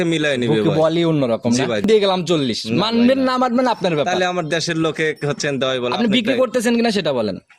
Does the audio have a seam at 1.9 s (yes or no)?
yes